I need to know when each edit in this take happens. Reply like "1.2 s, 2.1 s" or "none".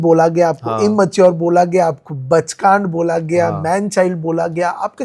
none